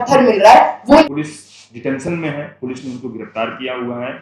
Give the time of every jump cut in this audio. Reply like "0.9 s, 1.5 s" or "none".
1.0 s